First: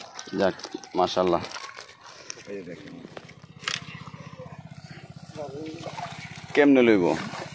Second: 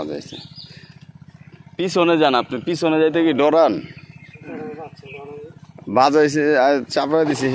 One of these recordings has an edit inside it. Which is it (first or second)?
first